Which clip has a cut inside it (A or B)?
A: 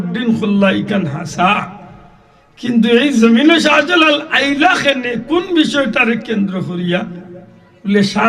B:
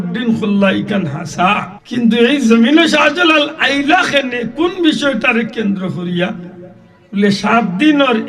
B